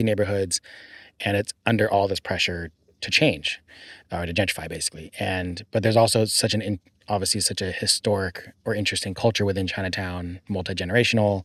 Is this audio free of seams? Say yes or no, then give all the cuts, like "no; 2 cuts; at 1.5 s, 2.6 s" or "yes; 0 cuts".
yes; 0 cuts